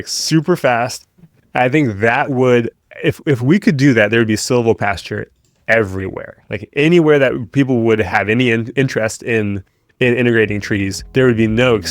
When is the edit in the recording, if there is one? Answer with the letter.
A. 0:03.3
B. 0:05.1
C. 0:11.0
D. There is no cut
C